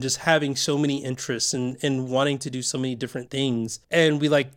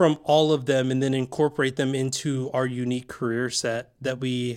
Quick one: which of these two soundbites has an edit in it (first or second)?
first